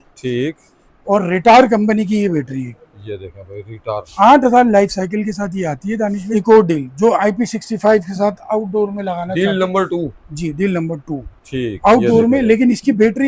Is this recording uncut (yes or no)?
no